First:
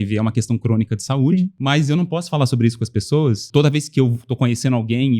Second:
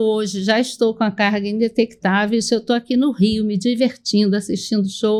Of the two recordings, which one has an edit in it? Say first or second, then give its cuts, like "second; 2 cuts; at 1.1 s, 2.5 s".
first; 2 cuts; at 1.6 s, 3.4 s